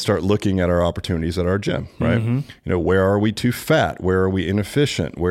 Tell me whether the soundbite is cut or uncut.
uncut